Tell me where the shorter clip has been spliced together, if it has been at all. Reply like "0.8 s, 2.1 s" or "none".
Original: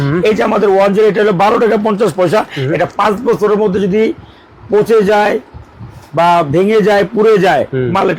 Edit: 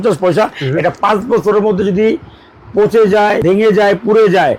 3.4 s